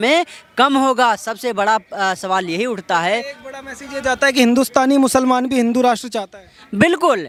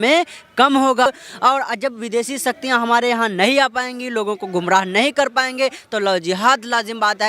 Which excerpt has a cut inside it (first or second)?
second